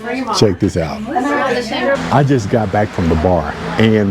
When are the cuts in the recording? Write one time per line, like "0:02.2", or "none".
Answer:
0:02.0